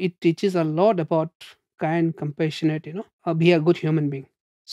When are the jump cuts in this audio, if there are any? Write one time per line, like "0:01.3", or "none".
0:03.2